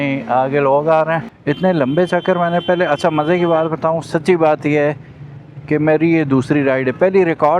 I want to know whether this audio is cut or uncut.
cut